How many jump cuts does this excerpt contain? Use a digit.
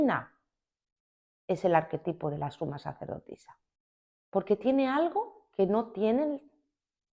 1